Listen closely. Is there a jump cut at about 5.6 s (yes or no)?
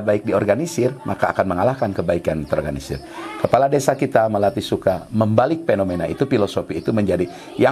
no